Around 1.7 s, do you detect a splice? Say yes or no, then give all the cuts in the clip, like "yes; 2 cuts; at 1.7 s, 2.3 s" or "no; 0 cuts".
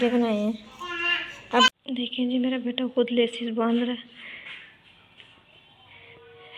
yes; 1 cut; at 1.7 s